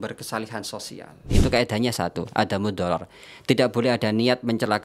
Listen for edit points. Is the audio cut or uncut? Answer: cut